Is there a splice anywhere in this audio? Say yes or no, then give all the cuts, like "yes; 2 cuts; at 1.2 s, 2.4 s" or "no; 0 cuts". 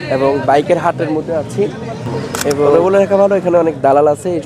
yes; 1 cut; at 2.7 s